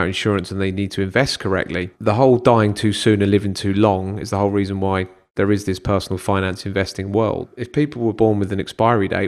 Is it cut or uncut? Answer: cut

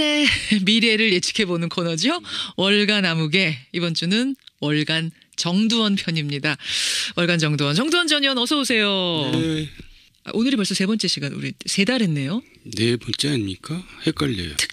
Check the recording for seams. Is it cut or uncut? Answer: uncut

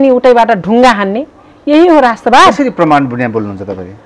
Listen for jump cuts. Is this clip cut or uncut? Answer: uncut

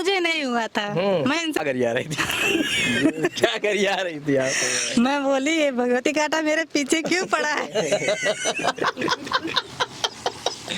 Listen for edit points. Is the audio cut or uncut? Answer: cut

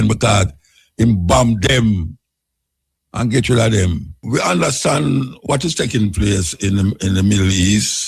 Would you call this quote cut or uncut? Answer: cut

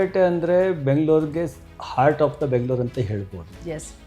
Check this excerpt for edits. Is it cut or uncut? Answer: uncut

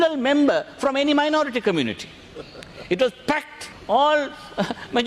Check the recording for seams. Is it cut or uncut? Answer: cut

